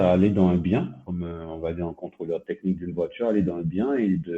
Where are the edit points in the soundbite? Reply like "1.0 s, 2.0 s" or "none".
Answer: 1.0 s